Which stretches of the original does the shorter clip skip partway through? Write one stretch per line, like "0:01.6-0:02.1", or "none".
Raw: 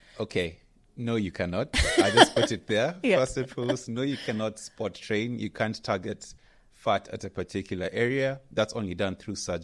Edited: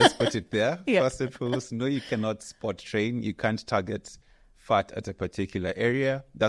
none